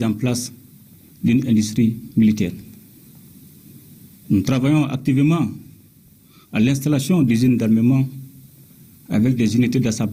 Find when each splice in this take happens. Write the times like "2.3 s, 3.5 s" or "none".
none